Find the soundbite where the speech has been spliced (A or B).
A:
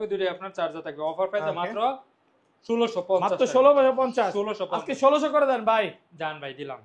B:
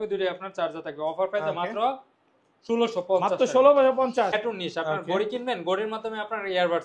B